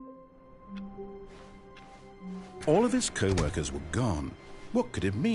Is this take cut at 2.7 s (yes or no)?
yes